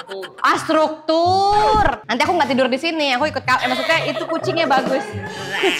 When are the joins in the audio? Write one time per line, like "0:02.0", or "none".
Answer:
0:02.0